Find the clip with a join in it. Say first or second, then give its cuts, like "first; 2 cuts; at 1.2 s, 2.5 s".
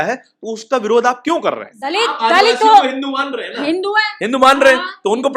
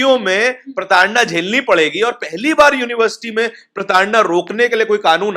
first; 1 cut; at 1.7 s